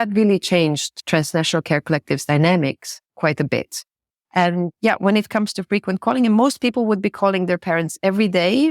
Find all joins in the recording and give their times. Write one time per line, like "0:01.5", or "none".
0:00.9